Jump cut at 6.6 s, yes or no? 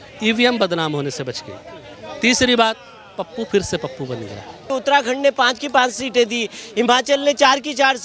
no